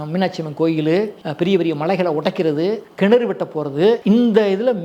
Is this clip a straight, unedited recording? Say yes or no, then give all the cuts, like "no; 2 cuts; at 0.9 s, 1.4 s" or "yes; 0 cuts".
no; 3 cuts; at 1.2 s, 2.9 s, 4.0 s